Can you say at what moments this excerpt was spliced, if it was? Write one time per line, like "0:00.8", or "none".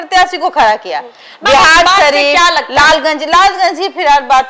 none